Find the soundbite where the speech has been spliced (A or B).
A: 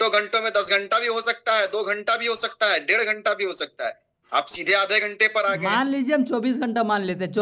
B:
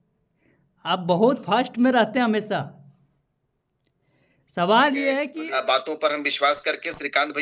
B